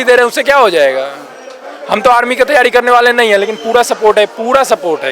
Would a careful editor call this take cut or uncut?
uncut